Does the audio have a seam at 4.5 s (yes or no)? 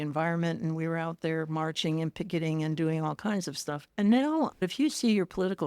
yes